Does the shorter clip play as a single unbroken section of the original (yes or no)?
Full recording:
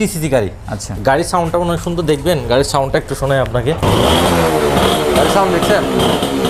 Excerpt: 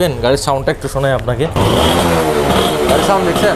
yes